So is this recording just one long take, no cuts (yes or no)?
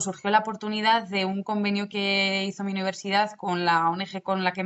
yes